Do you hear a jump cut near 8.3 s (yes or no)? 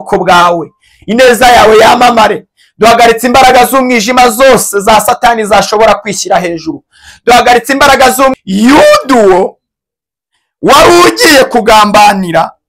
yes